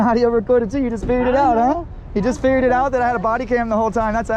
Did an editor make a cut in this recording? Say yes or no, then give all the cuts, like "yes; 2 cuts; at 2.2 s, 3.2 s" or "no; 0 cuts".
no; 0 cuts